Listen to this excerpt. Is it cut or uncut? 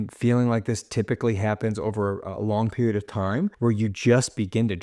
cut